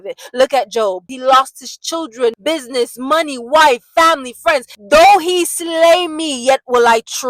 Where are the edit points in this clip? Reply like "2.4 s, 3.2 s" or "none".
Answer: 1.1 s, 2.4 s, 4.8 s